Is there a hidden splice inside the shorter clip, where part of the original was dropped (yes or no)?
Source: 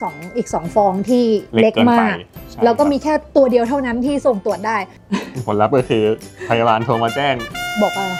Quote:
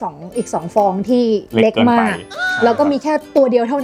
no